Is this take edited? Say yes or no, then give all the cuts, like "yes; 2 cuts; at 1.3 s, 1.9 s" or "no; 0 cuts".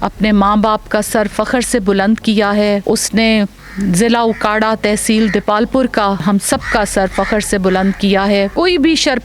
yes; 3 cuts; at 2.8 s, 6.2 s, 8.5 s